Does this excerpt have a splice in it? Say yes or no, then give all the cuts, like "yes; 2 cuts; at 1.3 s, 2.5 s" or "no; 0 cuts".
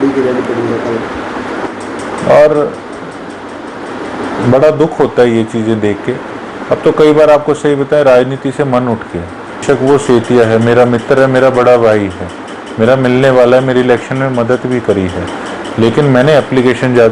yes; 2 cuts; at 1.7 s, 9.6 s